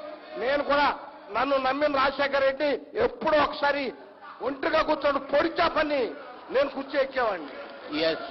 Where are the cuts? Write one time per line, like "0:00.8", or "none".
none